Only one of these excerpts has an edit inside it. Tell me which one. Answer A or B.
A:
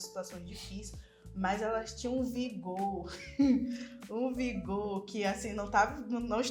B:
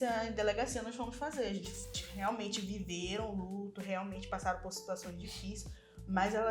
B